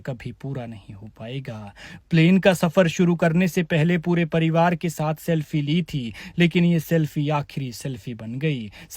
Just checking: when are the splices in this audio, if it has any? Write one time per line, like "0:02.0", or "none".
none